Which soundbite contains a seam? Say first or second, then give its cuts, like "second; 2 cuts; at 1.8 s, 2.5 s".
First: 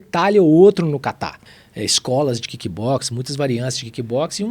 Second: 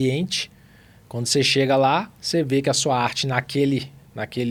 first; 1 cut; at 1.1 s